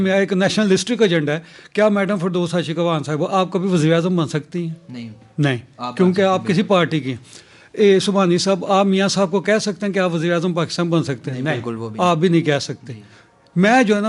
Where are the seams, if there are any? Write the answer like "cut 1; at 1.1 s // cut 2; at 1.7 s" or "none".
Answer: none